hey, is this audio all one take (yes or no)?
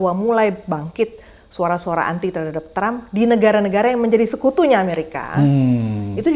yes